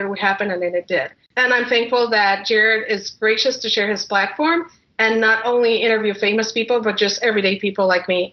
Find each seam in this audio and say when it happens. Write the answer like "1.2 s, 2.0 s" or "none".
none